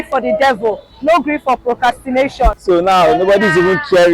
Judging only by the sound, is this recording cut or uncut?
cut